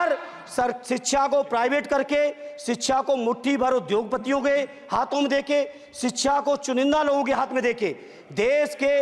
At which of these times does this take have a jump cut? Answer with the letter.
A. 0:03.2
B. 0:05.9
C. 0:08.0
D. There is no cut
D